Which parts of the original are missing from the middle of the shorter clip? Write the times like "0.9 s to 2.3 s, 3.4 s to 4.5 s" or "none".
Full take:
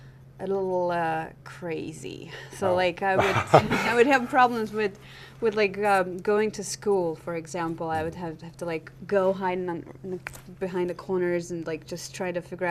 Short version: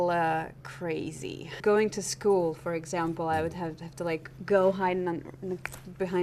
2.3 s to 6.2 s